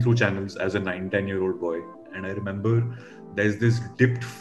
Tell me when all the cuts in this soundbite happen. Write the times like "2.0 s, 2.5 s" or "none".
2.1 s